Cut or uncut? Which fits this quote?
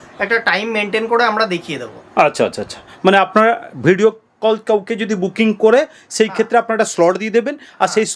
uncut